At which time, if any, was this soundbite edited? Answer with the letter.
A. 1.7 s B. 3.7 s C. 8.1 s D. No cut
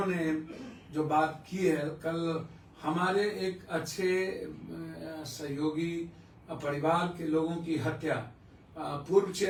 D